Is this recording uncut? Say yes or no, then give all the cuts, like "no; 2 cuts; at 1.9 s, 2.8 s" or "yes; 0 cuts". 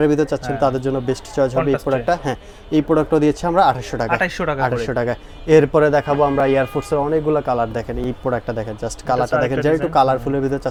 yes; 0 cuts